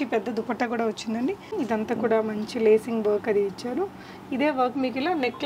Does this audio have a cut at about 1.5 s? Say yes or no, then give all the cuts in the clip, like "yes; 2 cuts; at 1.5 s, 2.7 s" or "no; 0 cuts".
yes; 1 cut; at 1.5 s